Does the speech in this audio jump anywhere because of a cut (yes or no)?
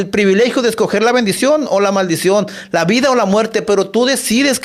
no